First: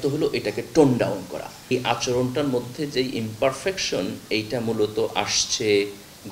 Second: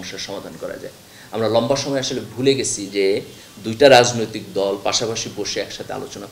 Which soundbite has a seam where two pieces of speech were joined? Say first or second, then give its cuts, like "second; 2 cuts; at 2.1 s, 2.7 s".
first; 1 cut; at 1.7 s